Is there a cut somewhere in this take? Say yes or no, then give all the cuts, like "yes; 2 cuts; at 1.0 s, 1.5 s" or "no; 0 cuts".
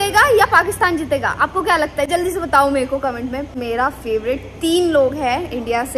no; 0 cuts